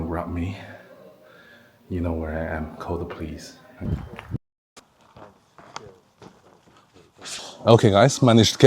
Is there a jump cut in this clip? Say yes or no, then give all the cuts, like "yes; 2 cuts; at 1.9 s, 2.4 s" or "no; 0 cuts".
yes; 2 cuts; at 3.8 s, 7.3 s